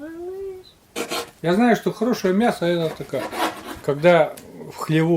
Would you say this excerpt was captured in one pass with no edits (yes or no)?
no